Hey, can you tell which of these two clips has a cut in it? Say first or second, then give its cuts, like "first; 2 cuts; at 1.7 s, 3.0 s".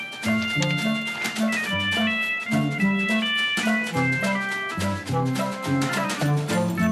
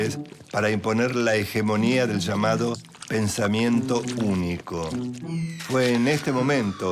first; 1 cut; at 4.4 s